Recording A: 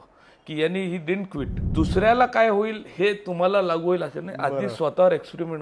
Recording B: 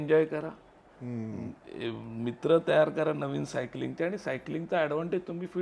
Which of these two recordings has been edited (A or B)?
A